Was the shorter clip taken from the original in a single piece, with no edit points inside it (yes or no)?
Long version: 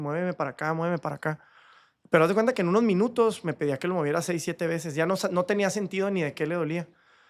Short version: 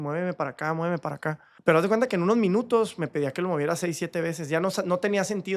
no